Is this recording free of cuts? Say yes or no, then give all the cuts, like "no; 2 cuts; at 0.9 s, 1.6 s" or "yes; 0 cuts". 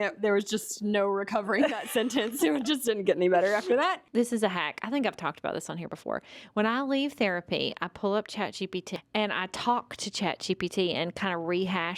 no; 1 cut; at 4.0 s